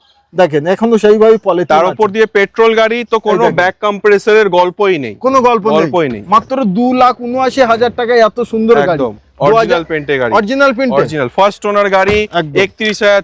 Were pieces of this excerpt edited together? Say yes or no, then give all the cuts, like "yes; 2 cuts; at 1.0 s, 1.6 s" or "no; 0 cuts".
no; 0 cuts